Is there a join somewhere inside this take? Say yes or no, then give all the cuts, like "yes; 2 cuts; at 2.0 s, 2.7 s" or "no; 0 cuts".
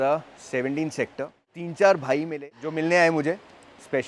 yes; 2 cuts; at 1.6 s, 2.6 s